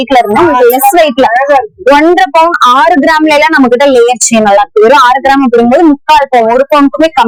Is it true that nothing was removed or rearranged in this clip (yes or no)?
yes